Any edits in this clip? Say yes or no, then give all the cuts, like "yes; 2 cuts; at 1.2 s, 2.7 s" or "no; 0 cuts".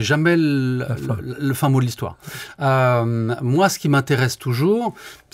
no; 0 cuts